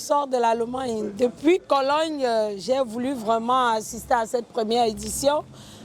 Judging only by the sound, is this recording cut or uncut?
uncut